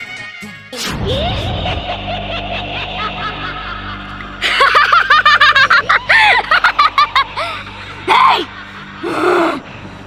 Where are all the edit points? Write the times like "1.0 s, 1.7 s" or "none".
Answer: none